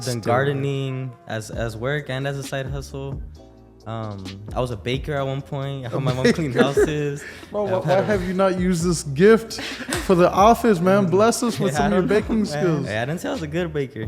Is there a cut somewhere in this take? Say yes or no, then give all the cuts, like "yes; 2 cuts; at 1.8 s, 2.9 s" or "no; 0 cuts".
yes; 1 cut; at 12.9 s